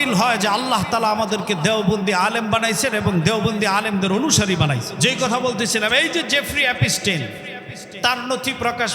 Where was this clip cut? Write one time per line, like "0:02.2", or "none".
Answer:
0:04.9